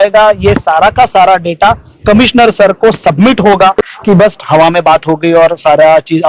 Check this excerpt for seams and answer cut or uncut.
cut